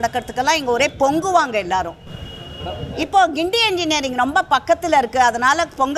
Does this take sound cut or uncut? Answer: uncut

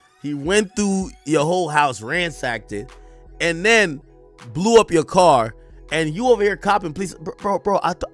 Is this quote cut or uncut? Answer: uncut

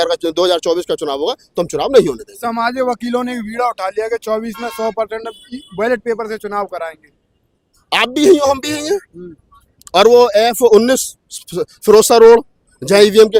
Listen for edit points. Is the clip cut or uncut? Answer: uncut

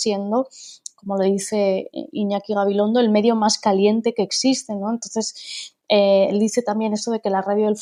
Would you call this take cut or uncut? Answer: uncut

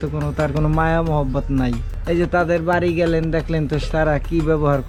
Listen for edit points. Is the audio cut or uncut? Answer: uncut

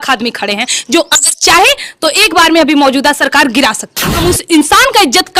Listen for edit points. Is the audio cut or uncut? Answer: cut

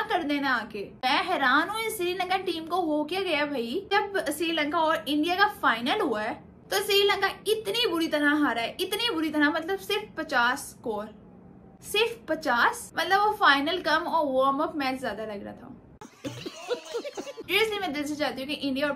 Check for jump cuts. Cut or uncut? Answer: cut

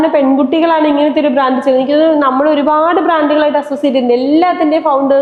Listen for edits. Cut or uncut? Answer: uncut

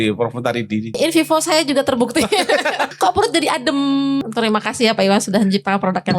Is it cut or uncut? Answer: cut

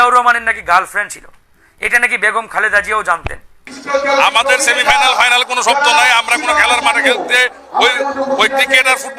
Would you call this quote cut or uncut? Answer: cut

